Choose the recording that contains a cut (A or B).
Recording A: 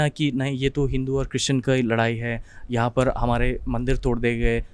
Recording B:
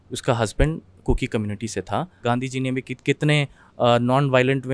B